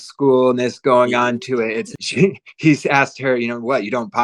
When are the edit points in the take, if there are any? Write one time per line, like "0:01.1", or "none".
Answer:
0:02.0